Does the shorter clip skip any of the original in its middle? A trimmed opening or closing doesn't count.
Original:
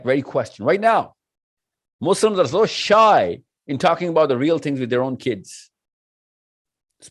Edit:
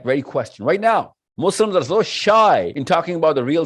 yes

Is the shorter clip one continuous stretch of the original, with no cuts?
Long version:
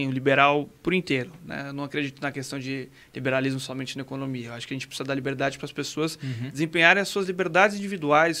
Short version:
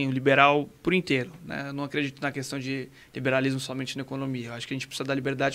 yes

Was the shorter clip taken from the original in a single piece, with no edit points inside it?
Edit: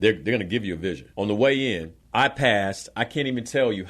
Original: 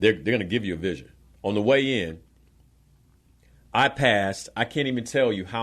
no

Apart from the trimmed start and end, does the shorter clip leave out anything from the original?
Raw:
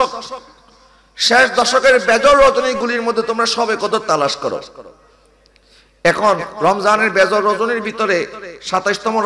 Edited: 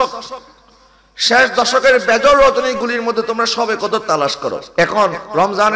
yes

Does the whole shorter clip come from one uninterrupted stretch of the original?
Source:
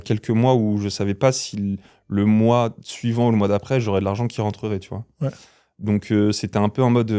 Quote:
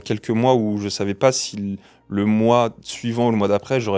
yes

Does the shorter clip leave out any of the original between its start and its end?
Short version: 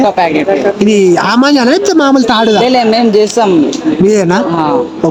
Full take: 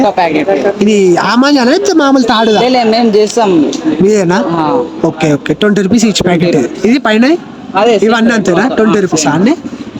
no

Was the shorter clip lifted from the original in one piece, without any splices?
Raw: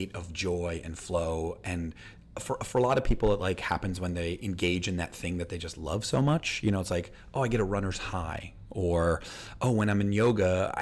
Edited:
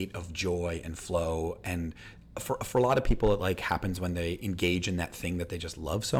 yes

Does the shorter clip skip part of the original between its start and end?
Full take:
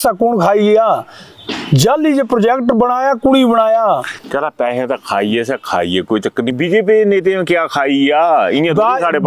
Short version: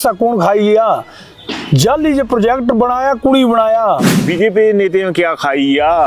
yes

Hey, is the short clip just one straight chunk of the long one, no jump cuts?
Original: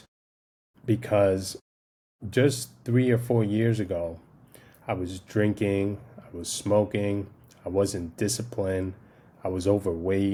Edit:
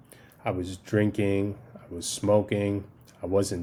yes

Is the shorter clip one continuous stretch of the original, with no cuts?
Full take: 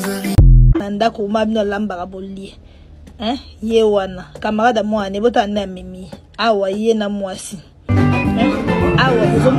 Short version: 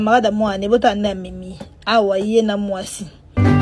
yes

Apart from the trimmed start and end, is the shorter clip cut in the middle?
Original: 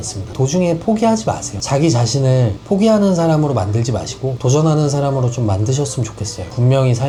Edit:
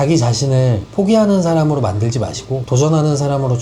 no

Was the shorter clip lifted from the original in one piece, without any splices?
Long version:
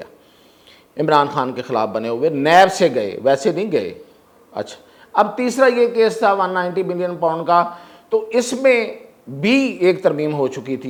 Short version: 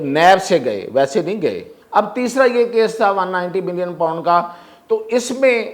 no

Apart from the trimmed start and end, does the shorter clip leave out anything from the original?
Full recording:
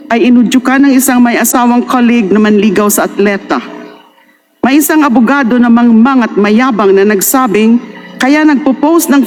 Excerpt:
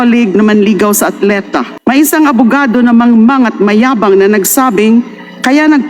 yes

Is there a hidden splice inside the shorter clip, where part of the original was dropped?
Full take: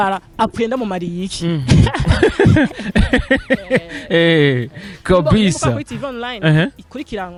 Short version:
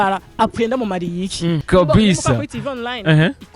yes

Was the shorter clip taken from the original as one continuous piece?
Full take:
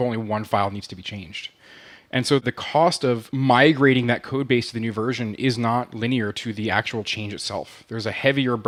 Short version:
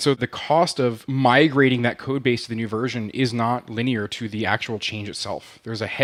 yes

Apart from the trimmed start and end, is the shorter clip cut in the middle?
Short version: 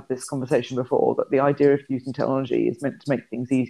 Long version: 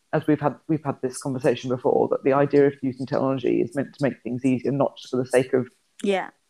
no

